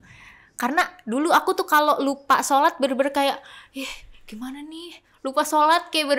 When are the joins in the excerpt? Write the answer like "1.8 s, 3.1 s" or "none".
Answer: none